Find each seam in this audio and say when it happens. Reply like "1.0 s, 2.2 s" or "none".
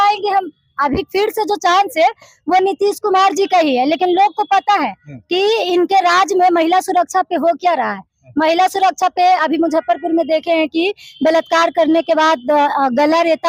none

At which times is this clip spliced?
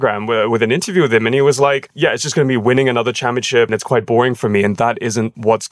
3.7 s

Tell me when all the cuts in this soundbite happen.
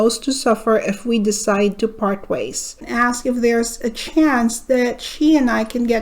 2.8 s

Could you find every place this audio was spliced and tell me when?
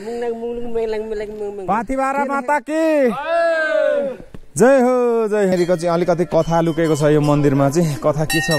1.6 s, 5.5 s

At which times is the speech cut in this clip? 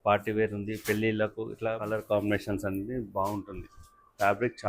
1.8 s

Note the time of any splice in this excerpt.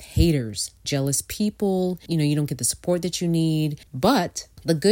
0.9 s, 2.0 s, 3.8 s

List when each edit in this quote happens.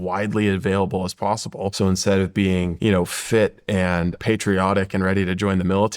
1.7 s, 2.7 s, 4.2 s

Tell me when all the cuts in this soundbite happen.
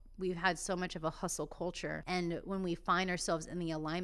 2.0 s

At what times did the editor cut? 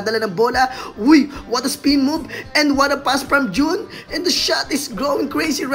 none

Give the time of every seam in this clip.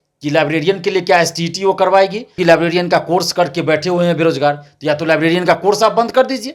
2.3 s

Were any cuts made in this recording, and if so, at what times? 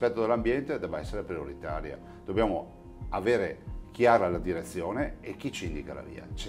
none

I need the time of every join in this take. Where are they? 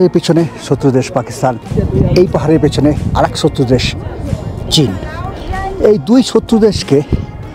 1.6 s

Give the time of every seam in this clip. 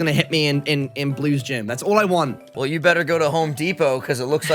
2.4 s

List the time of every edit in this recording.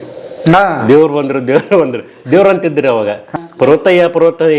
3.2 s

